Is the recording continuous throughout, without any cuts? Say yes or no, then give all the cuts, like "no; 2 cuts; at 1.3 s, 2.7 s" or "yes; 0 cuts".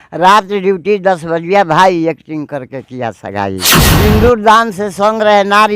no; 1 cut; at 4.0 s